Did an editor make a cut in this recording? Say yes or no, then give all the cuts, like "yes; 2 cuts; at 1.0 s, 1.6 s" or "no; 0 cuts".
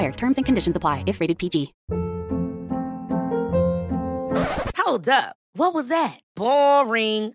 yes; 1 cut; at 1.8 s